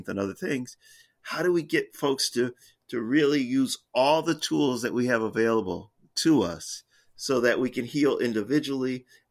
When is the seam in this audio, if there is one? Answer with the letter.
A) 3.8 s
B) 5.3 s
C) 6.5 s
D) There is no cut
D